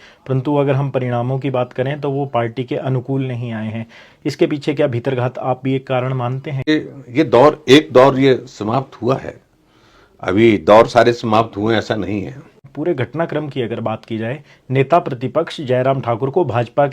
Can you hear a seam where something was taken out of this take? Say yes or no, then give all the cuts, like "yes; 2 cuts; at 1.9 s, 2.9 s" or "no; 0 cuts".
yes; 2 cuts; at 6.7 s, 12.6 s